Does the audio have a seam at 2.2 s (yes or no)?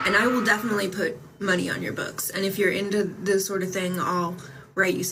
no